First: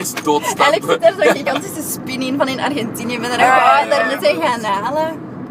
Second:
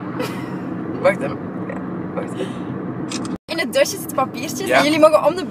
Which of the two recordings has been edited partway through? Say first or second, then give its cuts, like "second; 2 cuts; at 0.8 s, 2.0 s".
second; 1 cut; at 4.3 s